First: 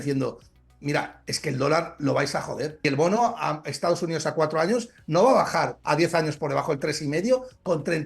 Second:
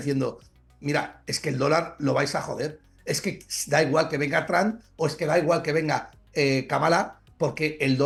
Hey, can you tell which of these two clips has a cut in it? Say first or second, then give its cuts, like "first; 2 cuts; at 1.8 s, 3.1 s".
first; 2 cuts; at 2.8 s, 5.8 s